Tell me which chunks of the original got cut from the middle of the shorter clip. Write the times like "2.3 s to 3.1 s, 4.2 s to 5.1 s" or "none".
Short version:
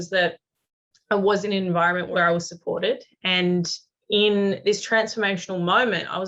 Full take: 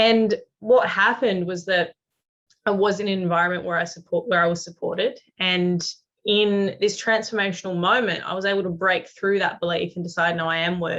3.7 s to 4.3 s